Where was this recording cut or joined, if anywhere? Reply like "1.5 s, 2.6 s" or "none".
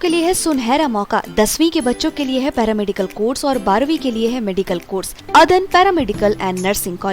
5.2 s